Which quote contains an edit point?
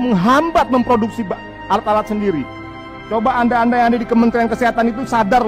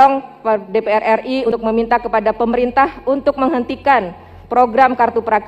second; 1 cut; at 1.5 s

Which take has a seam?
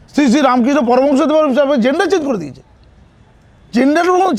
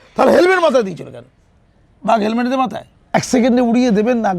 second; 1 cut; at 3.1 s

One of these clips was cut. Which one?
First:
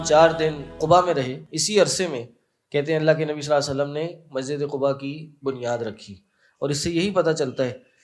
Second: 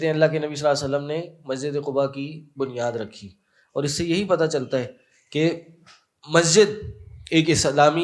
first; 2 cuts; at 0.8 s, 1.5 s

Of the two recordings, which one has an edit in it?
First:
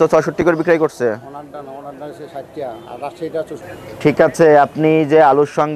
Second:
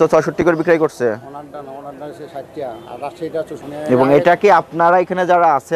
second; 1 cut; at 3.6 s

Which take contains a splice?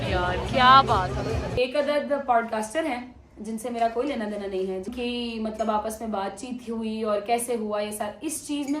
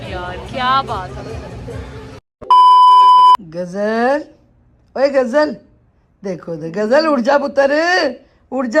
first; 2 cuts; at 1.5 s, 4.9 s

